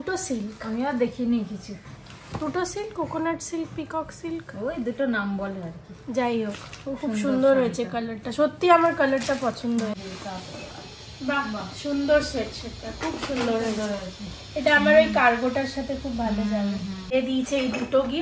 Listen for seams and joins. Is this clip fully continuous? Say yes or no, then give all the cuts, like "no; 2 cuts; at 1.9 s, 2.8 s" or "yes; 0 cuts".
no; 2 cuts; at 9.9 s, 17.1 s